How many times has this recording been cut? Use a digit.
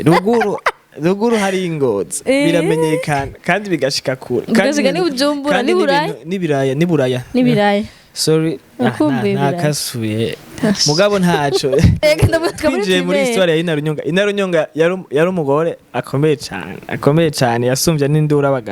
1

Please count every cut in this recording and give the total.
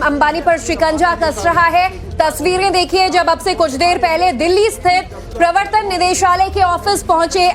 1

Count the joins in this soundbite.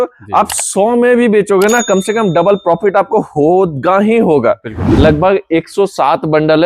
1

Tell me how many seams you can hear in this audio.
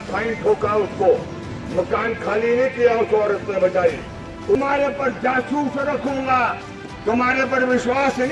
1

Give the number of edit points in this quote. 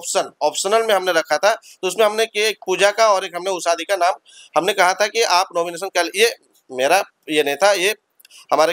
0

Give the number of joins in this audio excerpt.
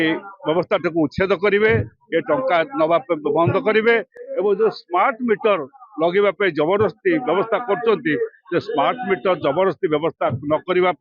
0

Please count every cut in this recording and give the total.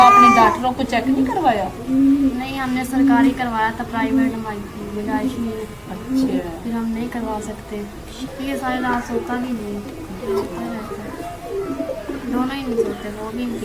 1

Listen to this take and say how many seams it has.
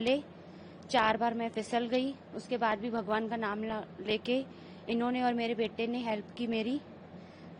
0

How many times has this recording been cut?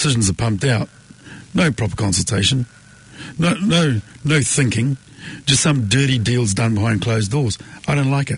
0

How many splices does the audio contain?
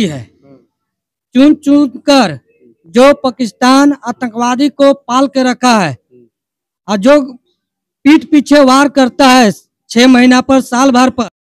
0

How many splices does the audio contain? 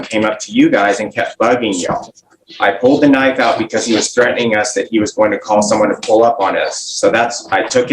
0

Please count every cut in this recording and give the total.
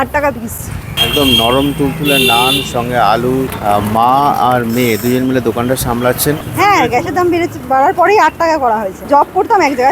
4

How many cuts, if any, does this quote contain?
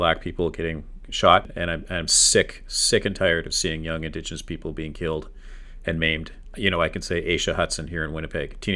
2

